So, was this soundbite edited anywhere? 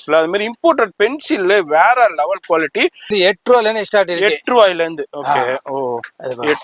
yes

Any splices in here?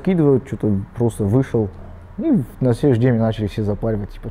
no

